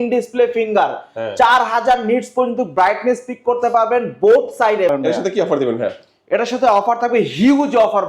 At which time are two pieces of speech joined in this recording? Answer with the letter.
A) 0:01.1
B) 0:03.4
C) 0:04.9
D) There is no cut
C